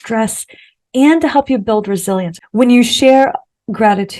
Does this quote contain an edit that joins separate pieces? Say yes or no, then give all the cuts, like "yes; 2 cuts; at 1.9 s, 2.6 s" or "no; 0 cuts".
yes; 1 cut; at 2.4 s